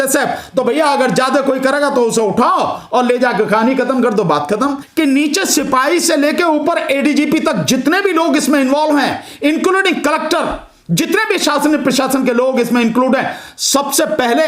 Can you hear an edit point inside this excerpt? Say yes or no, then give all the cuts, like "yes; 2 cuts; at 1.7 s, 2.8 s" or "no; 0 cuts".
yes; 1 cut; at 4.8 s